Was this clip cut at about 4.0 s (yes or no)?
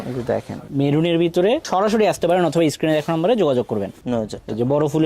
yes